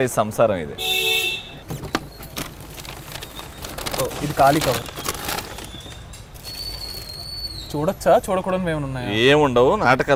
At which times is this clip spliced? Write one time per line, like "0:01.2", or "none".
none